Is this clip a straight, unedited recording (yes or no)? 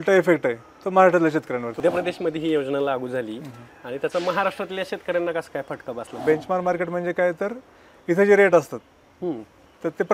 no